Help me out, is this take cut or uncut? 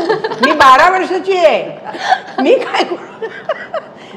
uncut